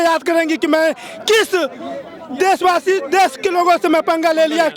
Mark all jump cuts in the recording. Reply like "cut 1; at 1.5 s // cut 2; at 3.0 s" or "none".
none